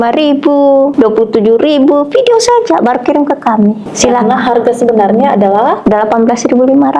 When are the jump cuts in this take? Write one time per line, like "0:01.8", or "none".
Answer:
0:00.9
0:03.9